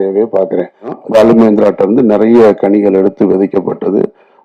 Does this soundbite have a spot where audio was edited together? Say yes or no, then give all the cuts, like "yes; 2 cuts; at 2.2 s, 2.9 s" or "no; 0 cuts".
yes; 1 cut; at 1.0 s